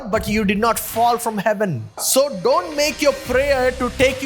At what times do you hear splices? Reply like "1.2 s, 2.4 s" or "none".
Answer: 2.0 s